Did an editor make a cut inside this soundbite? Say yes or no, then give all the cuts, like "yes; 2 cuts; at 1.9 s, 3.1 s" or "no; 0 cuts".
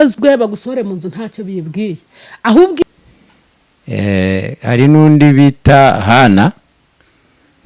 yes; 1 cut; at 2.8 s